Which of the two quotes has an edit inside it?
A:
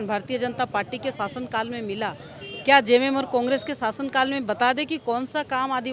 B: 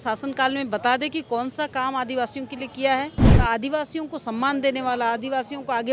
B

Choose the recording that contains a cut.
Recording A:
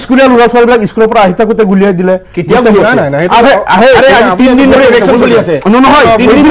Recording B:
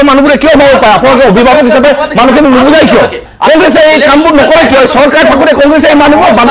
B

